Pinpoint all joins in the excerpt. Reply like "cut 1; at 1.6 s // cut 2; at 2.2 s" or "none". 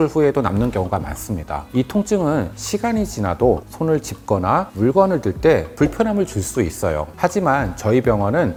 none